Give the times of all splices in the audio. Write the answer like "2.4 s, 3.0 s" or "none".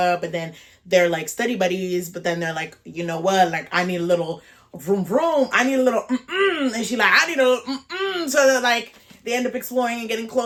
none